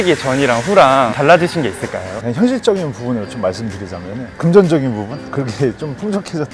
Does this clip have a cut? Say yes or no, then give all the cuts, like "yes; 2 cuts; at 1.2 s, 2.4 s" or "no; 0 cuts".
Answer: yes; 1 cut; at 2.2 s